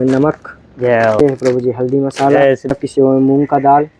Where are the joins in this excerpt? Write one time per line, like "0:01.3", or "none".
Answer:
0:01.2
0:02.7